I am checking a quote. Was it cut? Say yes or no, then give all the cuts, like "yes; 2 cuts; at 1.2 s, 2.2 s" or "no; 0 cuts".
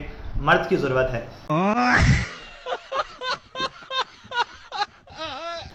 no; 0 cuts